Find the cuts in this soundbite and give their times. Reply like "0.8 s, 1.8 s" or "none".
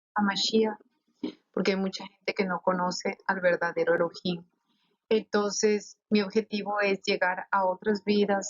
7.4 s